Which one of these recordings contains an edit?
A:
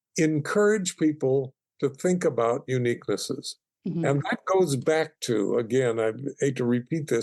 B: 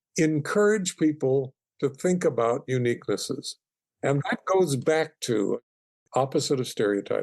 B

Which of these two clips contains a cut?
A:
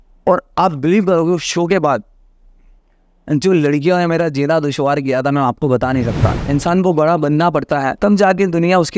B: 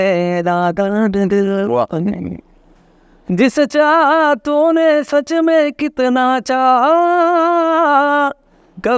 A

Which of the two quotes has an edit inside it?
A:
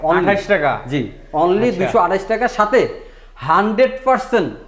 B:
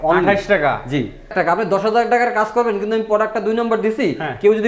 B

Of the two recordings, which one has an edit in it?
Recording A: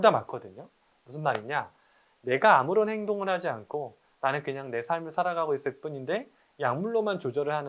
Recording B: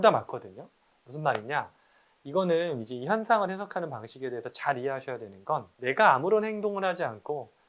A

